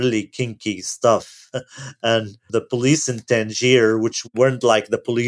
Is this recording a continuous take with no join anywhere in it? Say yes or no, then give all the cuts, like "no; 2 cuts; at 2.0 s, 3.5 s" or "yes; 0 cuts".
no; 2 cuts; at 2.4 s, 4.2 s